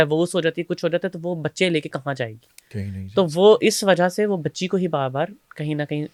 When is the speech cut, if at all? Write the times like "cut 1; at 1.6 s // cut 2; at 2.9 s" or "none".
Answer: none